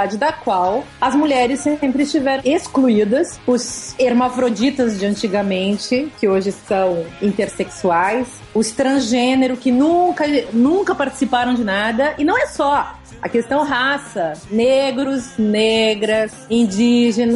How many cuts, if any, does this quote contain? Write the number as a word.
seven